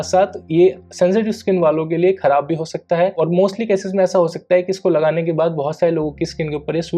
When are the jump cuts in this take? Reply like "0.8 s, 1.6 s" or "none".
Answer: none